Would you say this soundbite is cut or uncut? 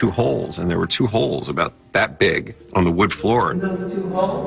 cut